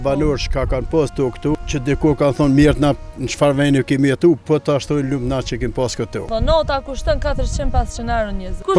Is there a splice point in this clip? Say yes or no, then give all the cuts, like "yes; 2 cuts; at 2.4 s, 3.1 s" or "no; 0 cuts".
yes; 2 cuts; at 1.6 s, 6.2 s